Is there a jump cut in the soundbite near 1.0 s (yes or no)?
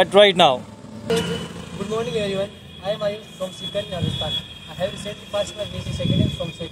yes